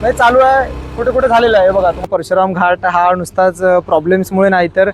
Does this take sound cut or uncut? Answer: cut